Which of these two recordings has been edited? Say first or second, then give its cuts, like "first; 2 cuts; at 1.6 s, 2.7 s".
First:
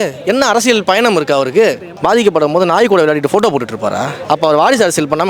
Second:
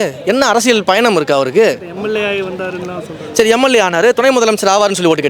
first; 2 cuts; at 1.9 s, 4.2 s